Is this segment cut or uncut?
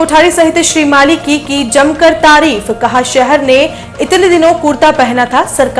uncut